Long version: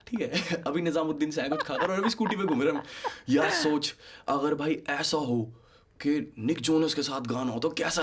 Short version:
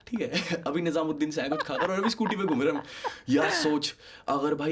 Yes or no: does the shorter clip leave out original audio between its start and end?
no